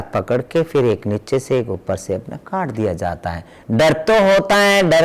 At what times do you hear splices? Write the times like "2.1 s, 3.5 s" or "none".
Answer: 3.6 s